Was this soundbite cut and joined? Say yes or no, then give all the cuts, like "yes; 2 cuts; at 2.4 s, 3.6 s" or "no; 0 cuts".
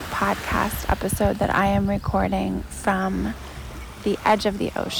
no; 0 cuts